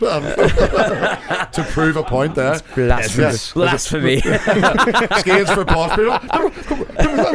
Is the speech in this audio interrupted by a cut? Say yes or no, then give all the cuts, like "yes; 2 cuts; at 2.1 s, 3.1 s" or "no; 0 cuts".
no; 0 cuts